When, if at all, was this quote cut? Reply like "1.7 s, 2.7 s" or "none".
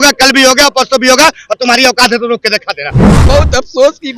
3.0 s